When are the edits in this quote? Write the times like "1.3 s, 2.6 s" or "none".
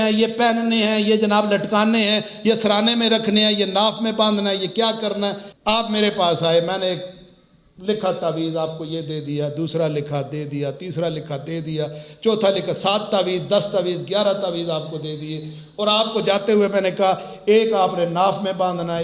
5.5 s